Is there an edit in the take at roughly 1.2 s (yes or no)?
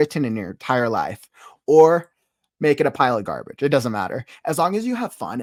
no